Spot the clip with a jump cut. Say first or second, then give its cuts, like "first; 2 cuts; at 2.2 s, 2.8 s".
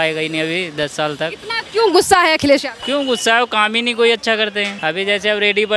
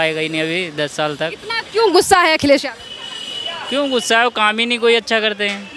first; 2 cuts; at 2.8 s, 4.7 s